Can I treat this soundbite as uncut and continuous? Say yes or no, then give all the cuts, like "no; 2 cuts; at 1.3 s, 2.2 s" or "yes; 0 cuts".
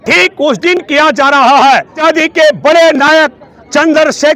yes; 0 cuts